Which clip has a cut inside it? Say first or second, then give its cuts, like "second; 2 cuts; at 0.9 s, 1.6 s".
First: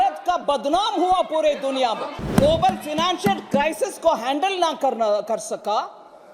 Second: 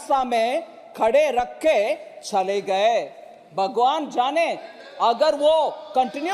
first; 1 cut; at 2.2 s